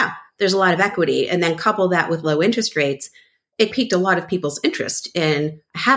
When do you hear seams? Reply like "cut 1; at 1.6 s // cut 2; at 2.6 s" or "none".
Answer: cut 1; at 3.7 s